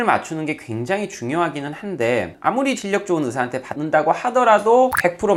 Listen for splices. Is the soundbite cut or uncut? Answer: uncut